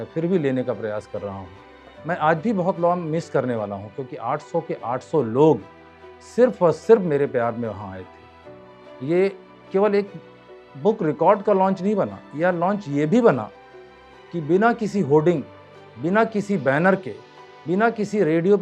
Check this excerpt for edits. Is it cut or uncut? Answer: cut